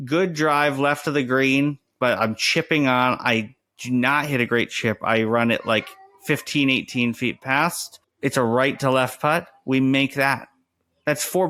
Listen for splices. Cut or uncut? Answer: uncut